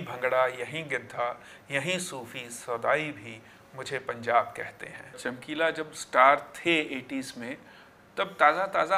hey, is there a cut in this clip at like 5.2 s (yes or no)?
yes